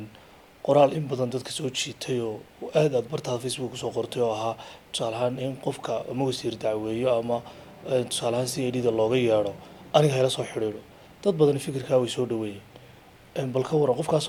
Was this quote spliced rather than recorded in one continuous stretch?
no; 0 cuts

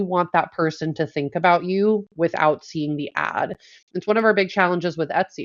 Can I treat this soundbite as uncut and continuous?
yes; 0 cuts

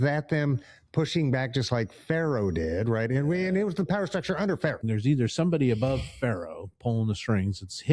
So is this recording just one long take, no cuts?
no; 1 cut; at 4.8 s

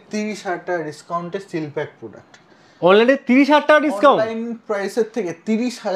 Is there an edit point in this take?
no; 0 cuts

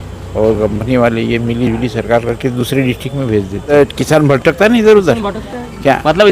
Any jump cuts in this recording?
yes; 1 cut; at 3.7 s

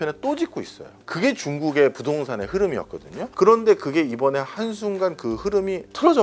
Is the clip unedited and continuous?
no; 1 cut; at 3.2 s

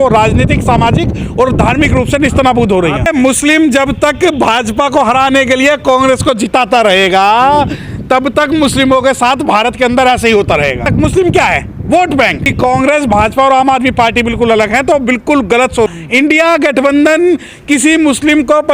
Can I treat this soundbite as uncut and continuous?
no; 4 cuts; at 3.1 s, 10.9 s, 12.5 s, 15.9 s

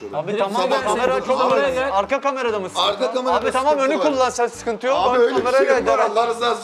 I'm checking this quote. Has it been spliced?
no; 0 cuts

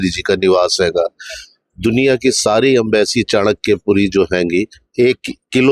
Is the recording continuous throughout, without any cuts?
yes; 0 cuts

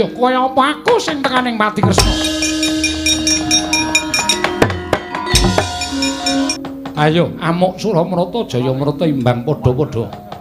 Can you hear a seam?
yes; 1 cut; at 6.5 s

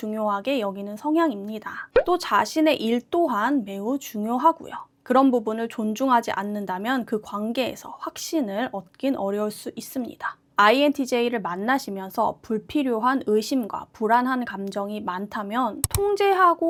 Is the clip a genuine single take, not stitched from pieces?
yes; 0 cuts

